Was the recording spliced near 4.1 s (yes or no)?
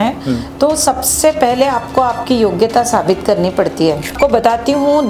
yes